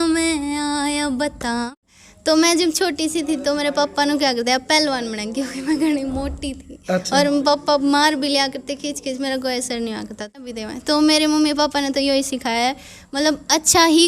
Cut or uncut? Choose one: cut